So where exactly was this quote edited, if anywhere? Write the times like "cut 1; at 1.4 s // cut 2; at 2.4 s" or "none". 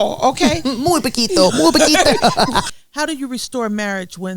cut 1; at 2.7 s